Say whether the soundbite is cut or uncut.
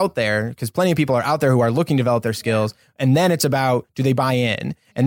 uncut